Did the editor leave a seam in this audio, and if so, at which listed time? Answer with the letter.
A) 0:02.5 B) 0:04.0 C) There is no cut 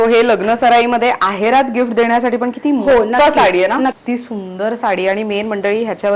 B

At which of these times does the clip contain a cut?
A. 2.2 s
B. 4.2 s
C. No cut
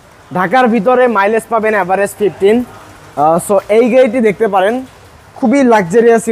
C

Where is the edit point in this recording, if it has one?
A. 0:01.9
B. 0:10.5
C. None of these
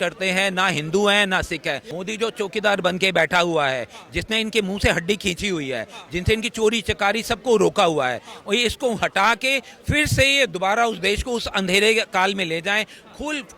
A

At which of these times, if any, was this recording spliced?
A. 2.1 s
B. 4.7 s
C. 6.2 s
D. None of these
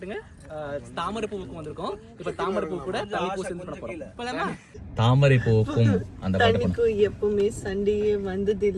B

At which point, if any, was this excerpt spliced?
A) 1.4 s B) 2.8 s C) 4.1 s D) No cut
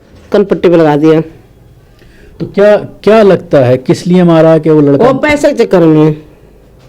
D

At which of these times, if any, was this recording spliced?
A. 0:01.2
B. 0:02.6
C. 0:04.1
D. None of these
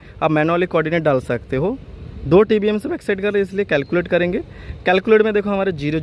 D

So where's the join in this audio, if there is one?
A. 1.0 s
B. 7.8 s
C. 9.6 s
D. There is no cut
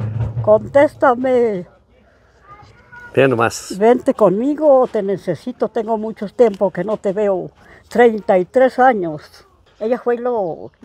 C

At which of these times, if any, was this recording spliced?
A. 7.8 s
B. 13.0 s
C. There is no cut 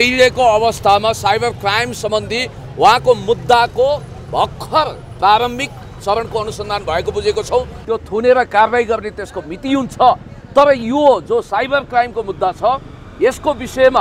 A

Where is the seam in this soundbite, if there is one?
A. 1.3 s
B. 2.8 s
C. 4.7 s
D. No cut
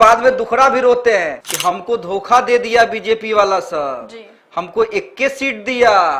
A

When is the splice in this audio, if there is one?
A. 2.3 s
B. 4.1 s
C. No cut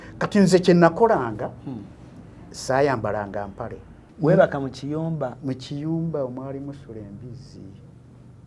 B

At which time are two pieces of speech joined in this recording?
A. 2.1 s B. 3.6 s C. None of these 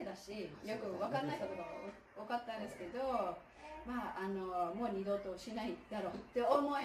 C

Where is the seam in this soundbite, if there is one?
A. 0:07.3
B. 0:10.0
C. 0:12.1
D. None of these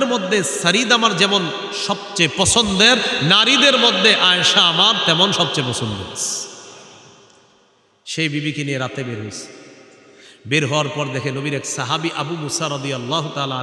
D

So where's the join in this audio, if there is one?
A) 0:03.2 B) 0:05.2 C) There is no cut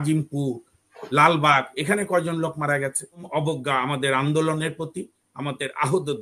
A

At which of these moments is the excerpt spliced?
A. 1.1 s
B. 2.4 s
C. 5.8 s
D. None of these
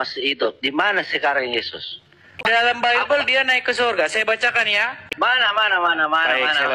B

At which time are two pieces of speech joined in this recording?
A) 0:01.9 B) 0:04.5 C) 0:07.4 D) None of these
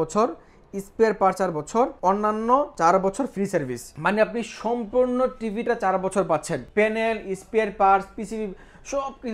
D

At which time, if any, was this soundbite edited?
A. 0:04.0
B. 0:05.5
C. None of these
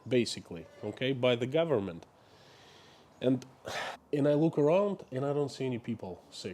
A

